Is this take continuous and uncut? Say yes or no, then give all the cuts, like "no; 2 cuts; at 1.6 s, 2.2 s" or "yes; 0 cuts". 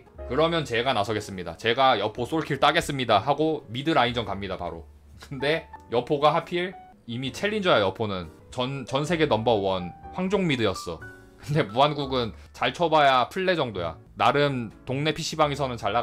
yes; 0 cuts